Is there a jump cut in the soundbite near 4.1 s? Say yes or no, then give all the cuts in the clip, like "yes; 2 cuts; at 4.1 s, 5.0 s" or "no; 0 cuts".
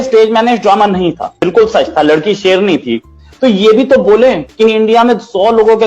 no; 1 cut; at 1.3 s